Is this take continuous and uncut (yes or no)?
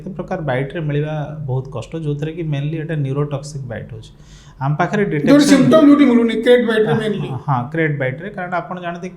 yes